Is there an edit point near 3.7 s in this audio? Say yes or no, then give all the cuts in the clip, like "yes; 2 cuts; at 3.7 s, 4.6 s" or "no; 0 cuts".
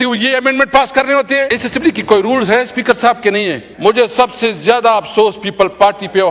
yes; 2 cuts; at 1.5 s, 3.7 s